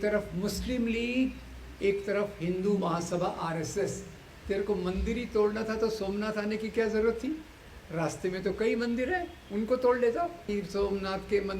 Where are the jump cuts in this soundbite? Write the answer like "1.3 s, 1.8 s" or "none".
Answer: 4.2 s, 10.5 s